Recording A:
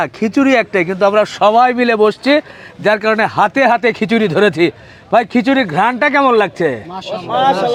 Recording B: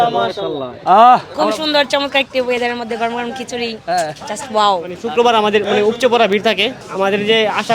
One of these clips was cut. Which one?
B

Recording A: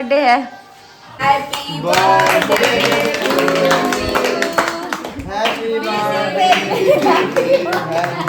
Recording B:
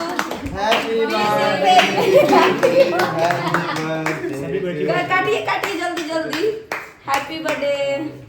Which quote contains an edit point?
A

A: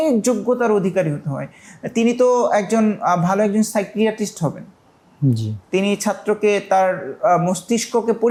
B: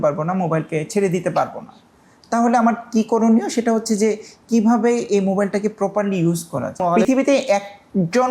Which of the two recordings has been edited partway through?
B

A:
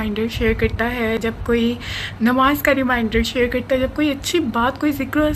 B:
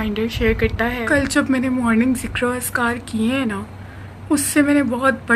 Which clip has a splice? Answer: B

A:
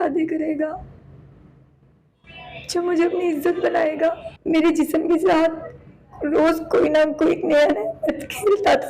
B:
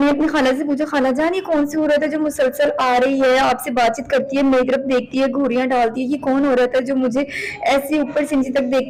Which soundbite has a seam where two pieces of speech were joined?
A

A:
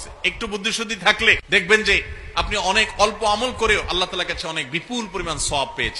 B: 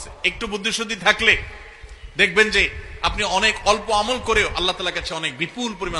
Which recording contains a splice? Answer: A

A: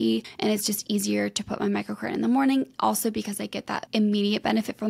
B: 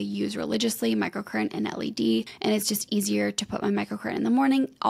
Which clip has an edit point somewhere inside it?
A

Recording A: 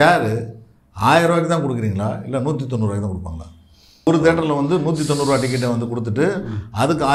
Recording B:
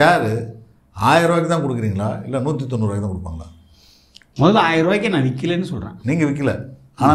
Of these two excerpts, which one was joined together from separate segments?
A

